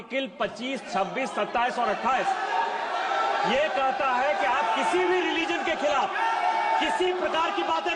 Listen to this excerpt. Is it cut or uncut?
uncut